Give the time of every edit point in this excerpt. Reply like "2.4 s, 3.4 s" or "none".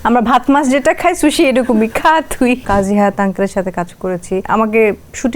2.6 s, 4.4 s